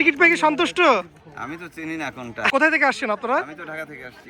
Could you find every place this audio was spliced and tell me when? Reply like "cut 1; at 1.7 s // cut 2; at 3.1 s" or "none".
cut 1; at 2.5 s

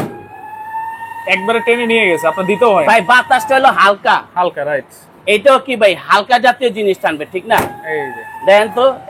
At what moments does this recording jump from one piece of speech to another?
none

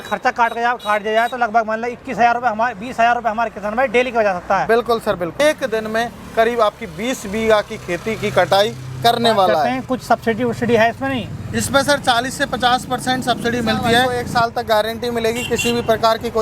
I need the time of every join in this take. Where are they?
cut 1; at 5.4 s // cut 2; at 9.7 s // cut 3; at 14.2 s

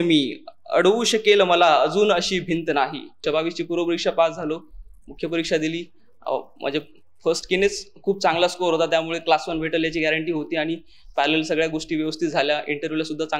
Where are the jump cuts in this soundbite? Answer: cut 1; at 3.2 s

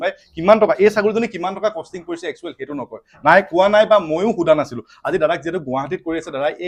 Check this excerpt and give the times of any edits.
none

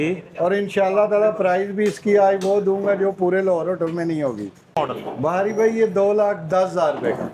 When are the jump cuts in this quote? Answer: cut 1; at 4.7 s

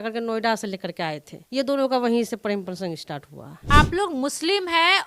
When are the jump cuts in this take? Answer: cut 1; at 1.3 s // cut 2; at 3.6 s

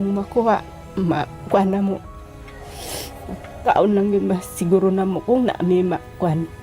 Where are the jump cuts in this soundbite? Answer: cut 1; at 3.6 s

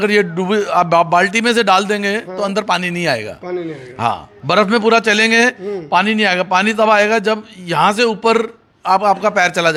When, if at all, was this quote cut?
none

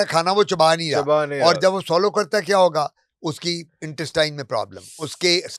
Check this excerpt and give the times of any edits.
none

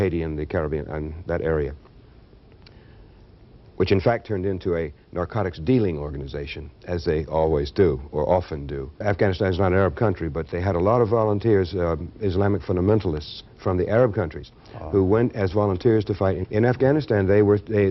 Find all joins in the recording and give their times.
cut 1; at 8.9 s // cut 2; at 16.3 s

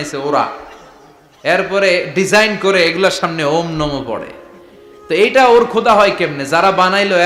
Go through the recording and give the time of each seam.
none

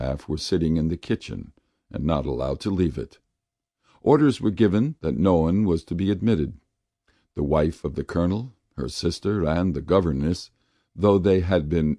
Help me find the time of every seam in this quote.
cut 1; at 2.8 s

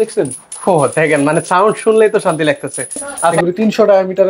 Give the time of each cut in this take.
cut 1; at 3.4 s

